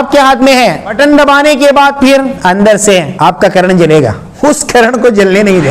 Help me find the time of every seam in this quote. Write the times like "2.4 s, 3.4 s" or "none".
0.9 s, 2.3 s, 3.1 s, 4.2 s